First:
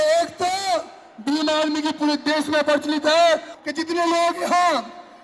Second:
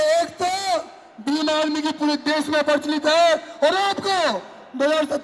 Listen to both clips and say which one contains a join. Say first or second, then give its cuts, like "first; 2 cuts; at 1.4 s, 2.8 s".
first; 1 cut; at 3.5 s